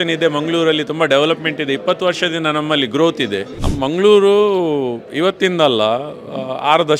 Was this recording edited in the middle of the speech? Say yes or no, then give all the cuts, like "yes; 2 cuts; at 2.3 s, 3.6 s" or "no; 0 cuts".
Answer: yes; 1 cut; at 3.6 s